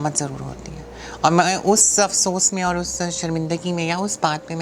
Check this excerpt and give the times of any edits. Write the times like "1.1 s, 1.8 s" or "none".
none

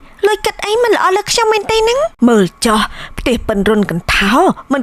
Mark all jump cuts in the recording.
2.1 s

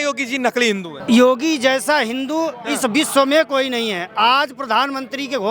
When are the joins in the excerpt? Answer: 0.9 s

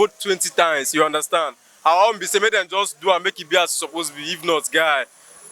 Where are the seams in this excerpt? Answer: none

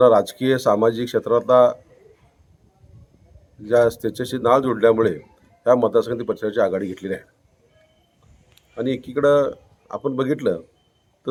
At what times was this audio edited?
none

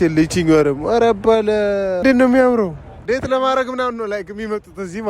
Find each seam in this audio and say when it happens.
2.0 s, 3.0 s

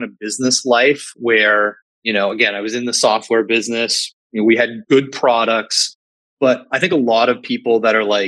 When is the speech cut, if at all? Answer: 4.8 s, 6.7 s

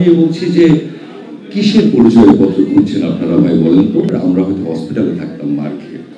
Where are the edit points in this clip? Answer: 4.1 s

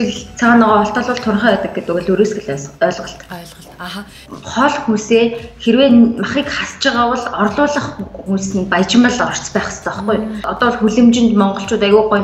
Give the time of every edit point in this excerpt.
4.2 s, 10.4 s

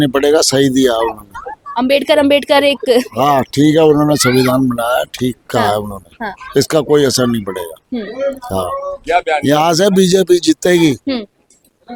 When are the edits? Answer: none

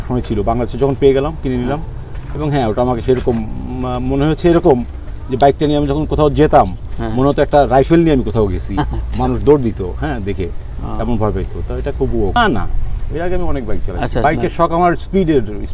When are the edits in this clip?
none

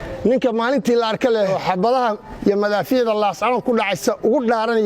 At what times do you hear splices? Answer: 1.5 s

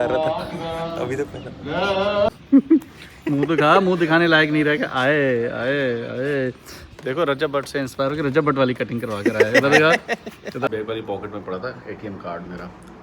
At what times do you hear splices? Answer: 2.4 s, 10.7 s

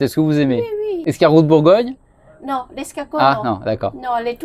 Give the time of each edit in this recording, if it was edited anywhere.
0.9 s

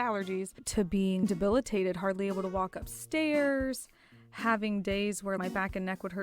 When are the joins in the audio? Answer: 1.2 s, 5.4 s

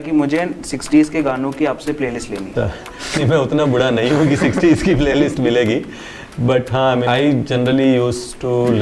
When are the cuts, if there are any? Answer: 2.5 s, 7.0 s

